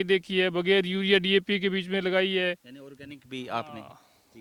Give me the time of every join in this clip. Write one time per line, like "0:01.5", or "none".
none